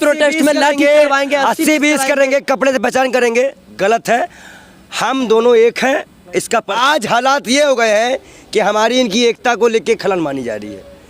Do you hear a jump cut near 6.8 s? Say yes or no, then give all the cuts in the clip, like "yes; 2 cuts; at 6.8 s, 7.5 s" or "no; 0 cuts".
yes; 1 cut; at 6.8 s